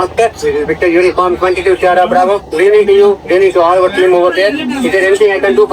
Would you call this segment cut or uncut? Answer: uncut